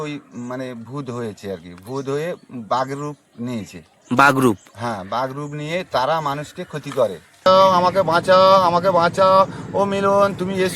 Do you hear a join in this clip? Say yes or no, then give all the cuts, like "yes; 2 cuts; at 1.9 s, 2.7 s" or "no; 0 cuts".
yes; 1 cut; at 7.5 s